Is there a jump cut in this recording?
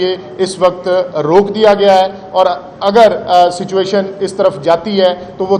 no; 0 cuts

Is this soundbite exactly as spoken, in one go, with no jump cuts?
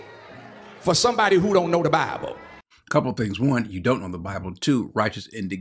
yes; 0 cuts

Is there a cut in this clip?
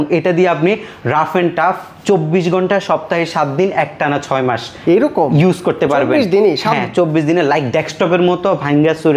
no; 0 cuts

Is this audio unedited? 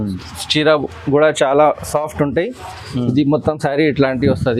yes; 0 cuts

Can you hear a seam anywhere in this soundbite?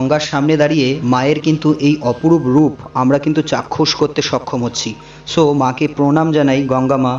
no; 0 cuts

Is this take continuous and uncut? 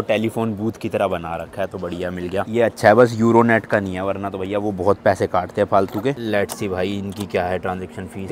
yes; 0 cuts

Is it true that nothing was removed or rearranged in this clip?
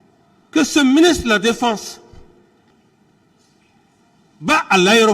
no; 1 cut; at 2.7 s

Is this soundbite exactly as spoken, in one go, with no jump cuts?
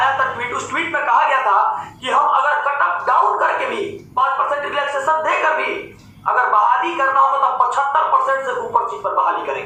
yes; 0 cuts

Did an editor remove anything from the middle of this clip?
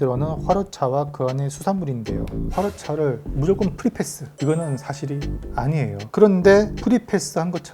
yes; 1 cut; at 2.3 s

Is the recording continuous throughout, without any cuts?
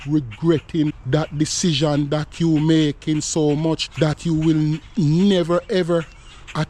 no; 2 cuts; at 1.0 s, 3.9 s

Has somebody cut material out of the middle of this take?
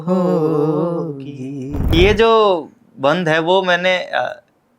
yes; 1 cut; at 1.9 s

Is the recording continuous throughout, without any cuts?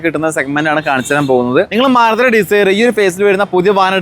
no; 1 cut; at 1.8 s

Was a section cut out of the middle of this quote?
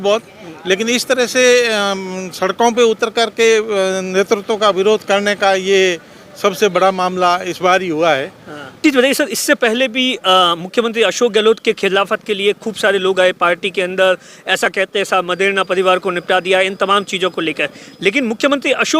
yes; 1 cut; at 8.8 s

